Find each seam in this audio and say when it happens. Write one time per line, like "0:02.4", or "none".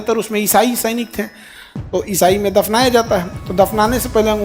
0:03.4